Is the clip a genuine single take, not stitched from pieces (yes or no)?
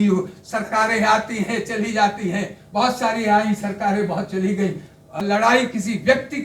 no